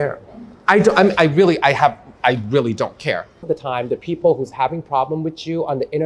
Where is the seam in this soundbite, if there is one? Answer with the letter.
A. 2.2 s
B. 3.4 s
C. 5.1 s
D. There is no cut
B